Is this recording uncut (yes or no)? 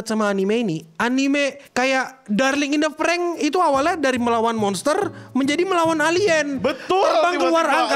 no